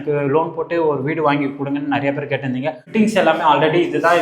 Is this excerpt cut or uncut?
cut